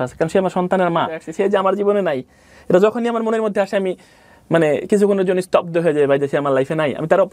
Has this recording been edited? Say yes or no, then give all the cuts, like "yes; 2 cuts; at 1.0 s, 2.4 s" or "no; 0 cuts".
yes; 1 cut; at 1.2 s